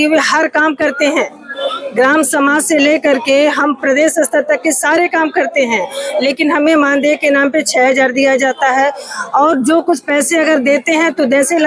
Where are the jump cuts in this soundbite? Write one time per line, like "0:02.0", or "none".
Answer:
none